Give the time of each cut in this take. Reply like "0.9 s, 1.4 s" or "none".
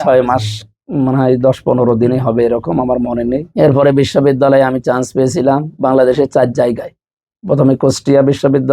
3.5 s